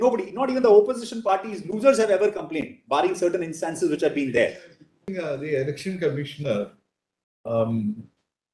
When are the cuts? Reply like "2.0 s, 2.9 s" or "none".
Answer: 5.0 s